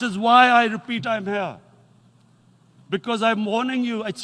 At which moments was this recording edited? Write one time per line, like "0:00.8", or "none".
none

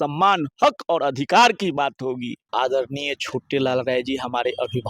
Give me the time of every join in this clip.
0:02.4

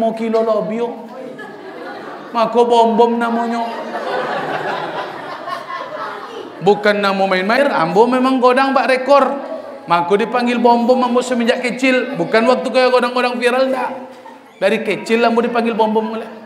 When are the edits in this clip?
0:07.6

